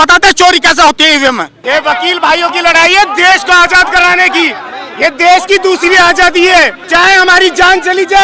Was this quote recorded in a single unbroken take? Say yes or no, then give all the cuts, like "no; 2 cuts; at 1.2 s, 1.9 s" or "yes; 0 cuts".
no; 2 cuts; at 1.5 s, 6.8 s